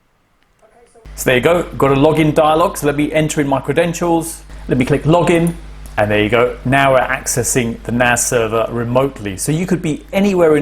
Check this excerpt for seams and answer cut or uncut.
cut